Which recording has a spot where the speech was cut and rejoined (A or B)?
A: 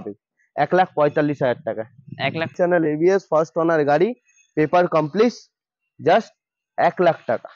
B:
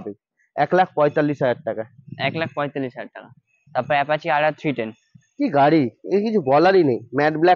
A